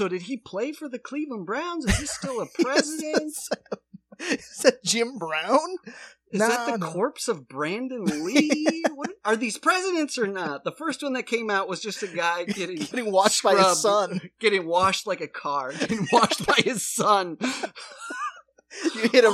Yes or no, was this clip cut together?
no